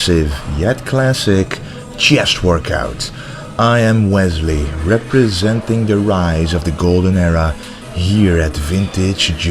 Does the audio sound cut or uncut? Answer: cut